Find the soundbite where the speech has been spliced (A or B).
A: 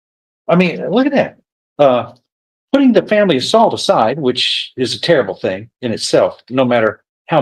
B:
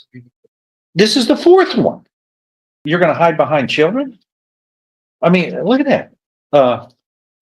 B